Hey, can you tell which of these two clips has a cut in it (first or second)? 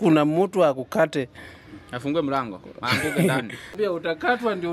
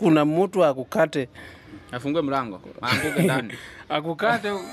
first